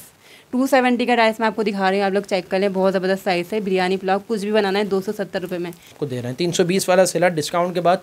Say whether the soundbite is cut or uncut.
cut